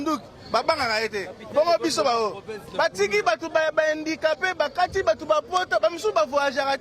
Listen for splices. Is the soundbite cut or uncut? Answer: uncut